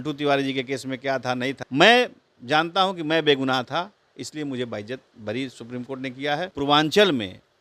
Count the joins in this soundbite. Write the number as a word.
two